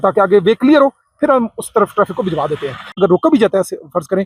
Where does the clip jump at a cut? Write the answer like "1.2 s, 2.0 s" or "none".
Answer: 3.0 s